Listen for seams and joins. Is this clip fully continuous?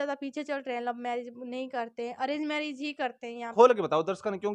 no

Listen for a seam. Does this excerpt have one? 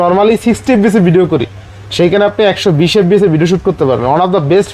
no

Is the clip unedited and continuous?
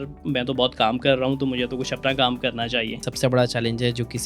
no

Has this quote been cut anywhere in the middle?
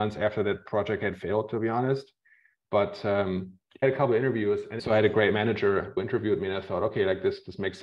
yes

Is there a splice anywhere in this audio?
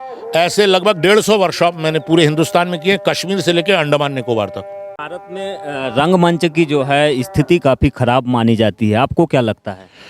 yes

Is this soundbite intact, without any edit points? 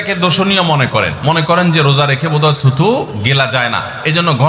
yes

